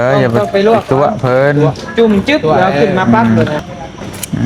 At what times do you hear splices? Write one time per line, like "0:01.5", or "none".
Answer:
0:03.6